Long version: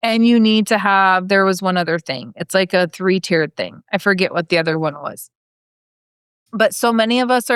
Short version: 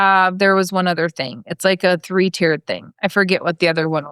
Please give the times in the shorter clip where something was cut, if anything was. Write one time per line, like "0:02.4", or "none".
none